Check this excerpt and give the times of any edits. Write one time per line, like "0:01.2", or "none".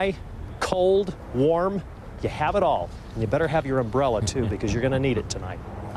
none